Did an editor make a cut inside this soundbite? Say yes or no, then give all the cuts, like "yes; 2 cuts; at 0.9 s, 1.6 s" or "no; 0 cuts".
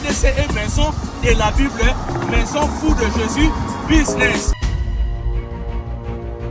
yes; 1 cut; at 4.5 s